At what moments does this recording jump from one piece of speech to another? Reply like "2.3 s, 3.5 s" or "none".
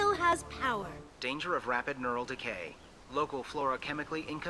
0.9 s